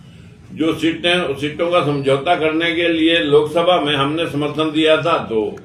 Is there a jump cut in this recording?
no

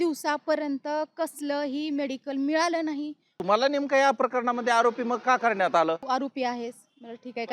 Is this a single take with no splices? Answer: no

